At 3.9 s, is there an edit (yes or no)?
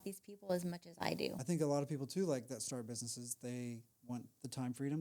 no